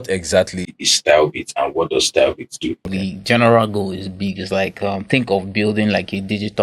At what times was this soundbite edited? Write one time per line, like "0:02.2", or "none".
0:02.9

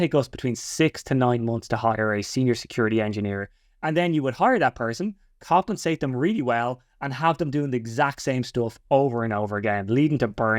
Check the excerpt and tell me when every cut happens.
none

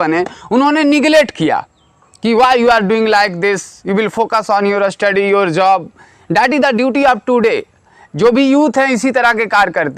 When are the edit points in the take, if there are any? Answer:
none

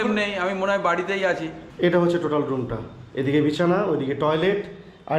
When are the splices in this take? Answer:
0:01.6

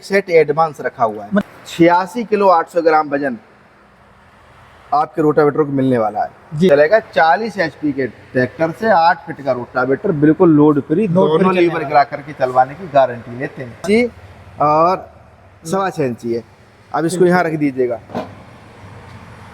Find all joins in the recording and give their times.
0:01.4
0:06.7
0:13.8

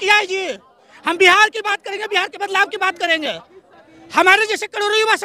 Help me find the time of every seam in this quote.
none

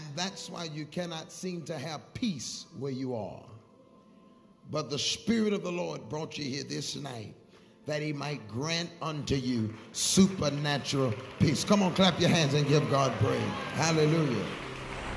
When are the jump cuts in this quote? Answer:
none

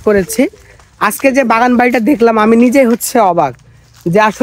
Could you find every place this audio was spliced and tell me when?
none

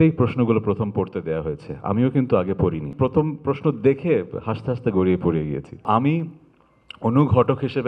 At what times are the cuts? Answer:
0:02.9
0:05.8

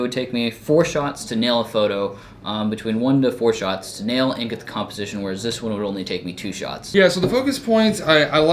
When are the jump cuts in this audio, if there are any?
0:06.8

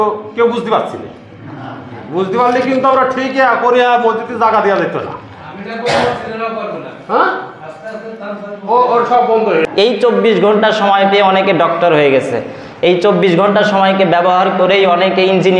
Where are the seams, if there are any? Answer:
0:09.7

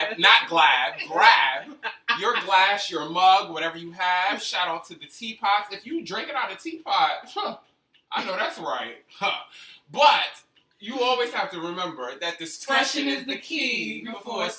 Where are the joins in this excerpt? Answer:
0:13.4

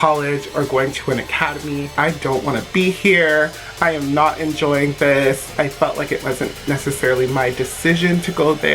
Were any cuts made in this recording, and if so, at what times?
0:01.9
0:05.4

